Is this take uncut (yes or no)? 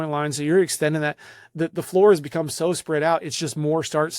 yes